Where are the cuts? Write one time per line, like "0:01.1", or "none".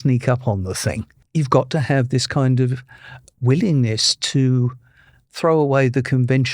0:01.1